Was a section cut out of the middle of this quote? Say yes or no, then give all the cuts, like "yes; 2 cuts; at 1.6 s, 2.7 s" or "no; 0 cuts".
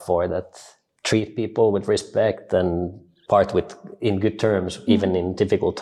no; 0 cuts